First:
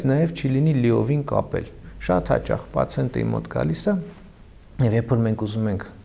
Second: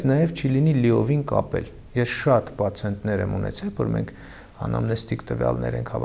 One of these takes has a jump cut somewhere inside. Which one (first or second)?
first